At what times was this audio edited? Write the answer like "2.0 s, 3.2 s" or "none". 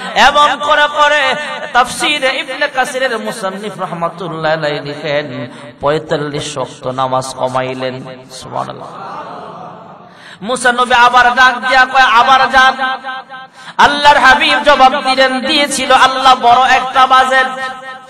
none